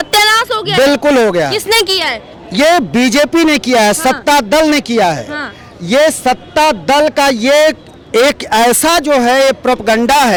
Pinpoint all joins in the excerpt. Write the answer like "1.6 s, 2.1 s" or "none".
none